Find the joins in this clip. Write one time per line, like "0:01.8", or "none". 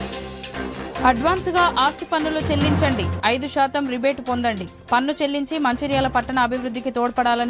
0:01.0